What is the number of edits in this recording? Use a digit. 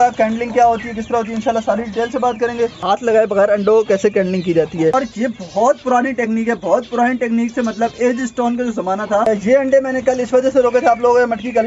3